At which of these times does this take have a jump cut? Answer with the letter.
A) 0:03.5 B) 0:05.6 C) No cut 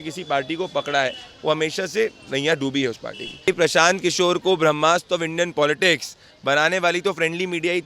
A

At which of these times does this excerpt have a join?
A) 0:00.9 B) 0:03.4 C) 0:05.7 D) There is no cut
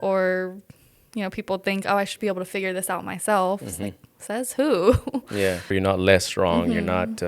C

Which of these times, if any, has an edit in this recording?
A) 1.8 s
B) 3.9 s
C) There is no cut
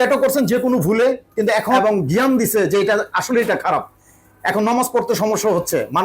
A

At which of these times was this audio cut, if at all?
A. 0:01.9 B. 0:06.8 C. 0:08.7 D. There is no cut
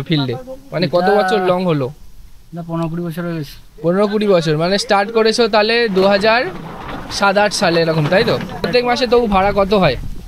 C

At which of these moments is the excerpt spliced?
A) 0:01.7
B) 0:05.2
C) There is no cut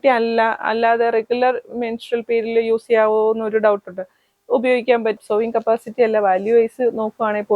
B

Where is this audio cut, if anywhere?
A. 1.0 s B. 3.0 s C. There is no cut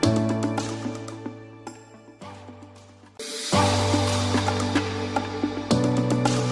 B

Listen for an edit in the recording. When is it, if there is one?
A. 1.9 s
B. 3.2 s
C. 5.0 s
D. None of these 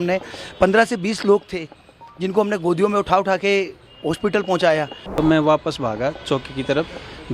C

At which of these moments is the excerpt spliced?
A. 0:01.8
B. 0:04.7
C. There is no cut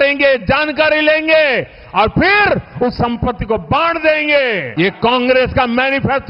B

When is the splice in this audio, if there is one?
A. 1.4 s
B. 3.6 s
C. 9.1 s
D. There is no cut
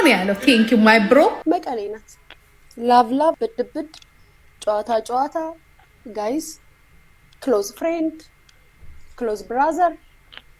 A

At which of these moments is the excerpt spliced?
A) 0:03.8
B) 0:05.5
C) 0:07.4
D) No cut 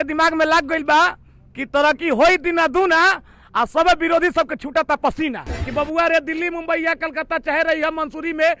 B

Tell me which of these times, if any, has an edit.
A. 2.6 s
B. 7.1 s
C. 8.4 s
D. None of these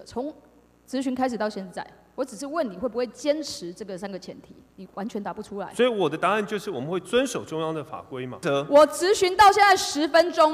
C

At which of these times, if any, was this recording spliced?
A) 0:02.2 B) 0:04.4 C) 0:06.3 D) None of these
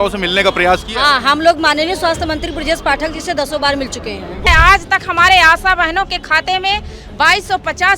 B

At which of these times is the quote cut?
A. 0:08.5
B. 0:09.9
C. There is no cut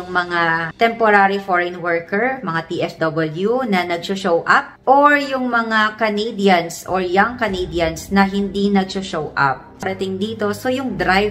B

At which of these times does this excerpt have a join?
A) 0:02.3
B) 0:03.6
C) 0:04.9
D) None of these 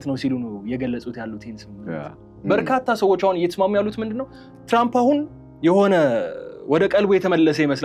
A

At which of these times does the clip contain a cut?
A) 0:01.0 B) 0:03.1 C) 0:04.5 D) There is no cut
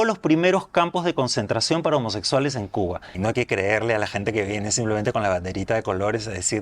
B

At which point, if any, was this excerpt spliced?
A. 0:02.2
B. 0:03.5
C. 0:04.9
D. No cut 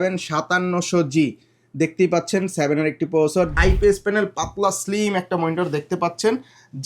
B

